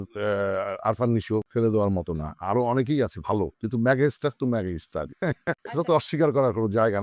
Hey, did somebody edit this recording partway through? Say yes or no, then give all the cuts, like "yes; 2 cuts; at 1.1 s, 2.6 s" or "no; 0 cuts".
yes; 3 cuts; at 1.5 s, 3.6 s, 5.6 s